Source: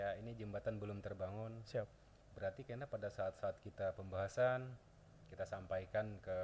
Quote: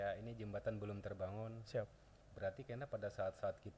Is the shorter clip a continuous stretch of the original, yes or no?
yes